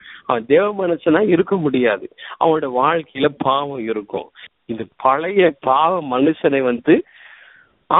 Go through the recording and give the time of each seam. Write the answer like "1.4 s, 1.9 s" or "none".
4.4 s